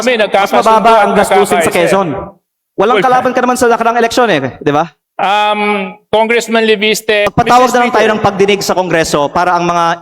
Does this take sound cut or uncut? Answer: cut